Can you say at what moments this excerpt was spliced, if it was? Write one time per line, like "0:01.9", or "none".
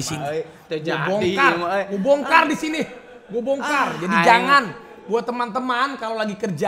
none